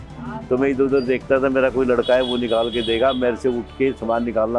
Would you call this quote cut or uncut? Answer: uncut